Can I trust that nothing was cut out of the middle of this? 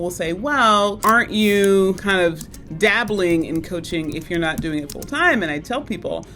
no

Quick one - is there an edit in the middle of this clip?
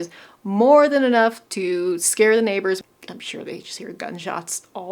yes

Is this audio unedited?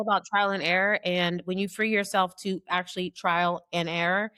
yes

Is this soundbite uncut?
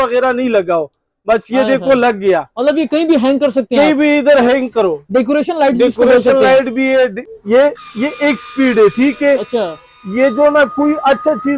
no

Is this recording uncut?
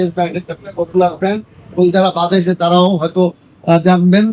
no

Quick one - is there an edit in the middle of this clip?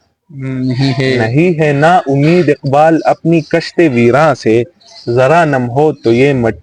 no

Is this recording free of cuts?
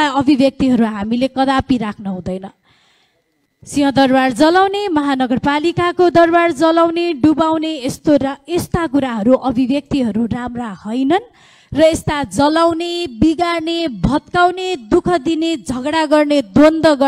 yes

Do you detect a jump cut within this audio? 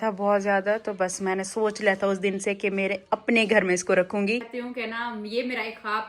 yes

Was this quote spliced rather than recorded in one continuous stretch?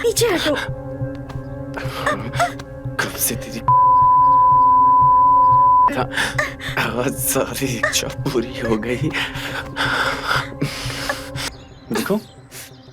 yes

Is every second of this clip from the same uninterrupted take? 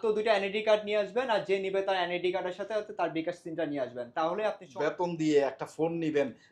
no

